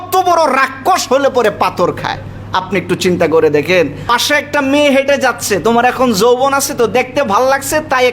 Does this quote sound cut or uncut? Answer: cut